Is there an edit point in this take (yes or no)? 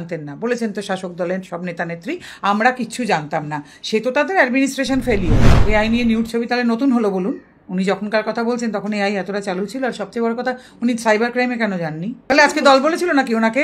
yes